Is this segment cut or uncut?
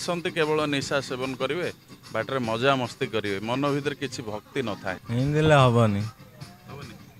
cut